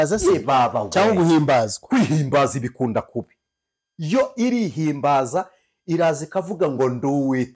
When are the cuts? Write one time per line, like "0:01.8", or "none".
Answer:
none

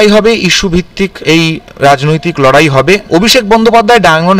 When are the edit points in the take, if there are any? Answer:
0:01.2
0:03.0

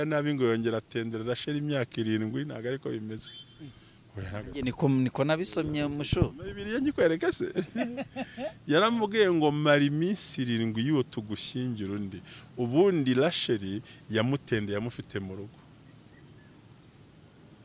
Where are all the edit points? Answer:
none

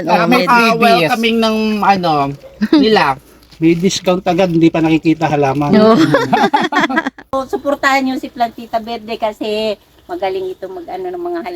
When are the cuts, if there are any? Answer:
0:07.3

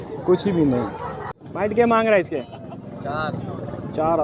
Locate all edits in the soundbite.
0:01.4

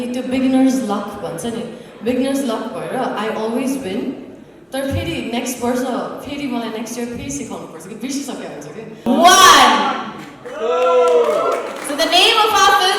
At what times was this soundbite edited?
0:09.0

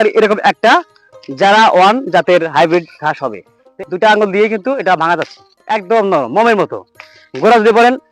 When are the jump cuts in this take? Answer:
0:03.8

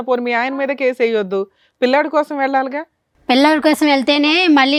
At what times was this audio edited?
none

